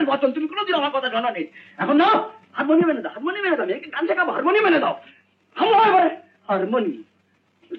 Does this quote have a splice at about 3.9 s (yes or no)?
no